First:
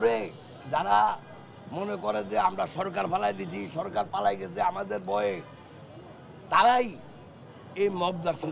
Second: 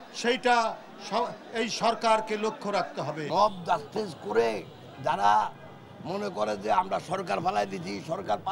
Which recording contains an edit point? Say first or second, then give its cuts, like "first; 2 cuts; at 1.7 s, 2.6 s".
second; 1 cut; at 3.2 s